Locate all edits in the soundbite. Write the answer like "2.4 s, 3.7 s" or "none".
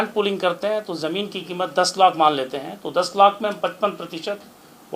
none